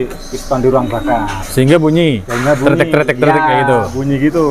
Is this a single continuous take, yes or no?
yes